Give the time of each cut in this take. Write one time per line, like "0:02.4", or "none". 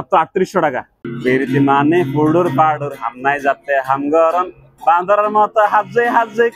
0:01.1